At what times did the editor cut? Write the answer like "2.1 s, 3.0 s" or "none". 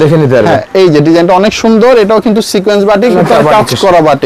3.1 s